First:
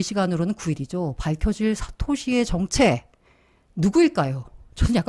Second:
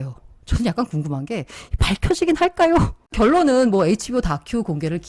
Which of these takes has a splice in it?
second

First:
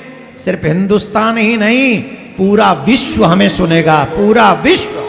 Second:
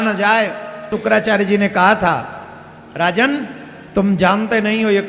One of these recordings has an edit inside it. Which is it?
second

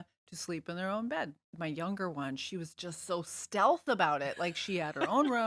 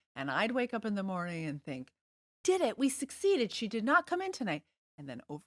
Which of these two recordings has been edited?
first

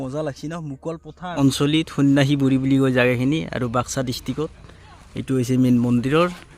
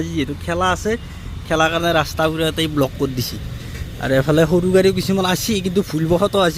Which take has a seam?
first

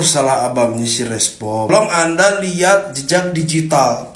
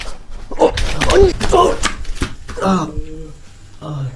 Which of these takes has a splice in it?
first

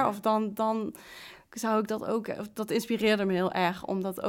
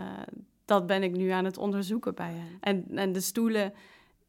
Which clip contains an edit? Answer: second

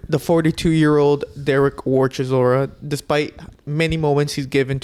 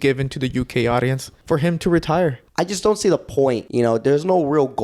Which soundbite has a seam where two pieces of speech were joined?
second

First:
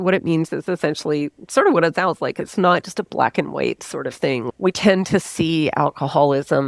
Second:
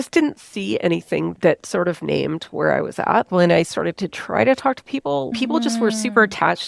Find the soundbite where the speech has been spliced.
second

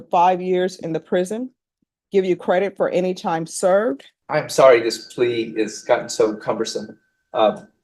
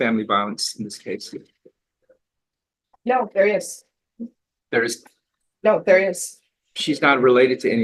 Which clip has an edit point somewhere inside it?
first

